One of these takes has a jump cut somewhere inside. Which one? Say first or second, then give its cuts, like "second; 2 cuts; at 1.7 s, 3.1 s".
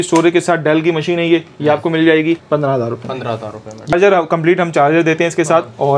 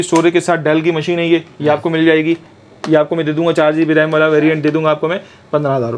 first; 2 cuts; at 2.4 s, 3.9 s